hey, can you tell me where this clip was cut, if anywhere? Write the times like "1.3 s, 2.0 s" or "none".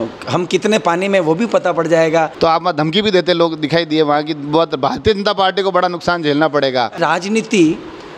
2.3 s, 7.0 s